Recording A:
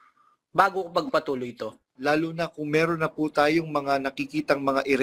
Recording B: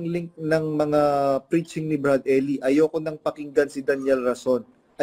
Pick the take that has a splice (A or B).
A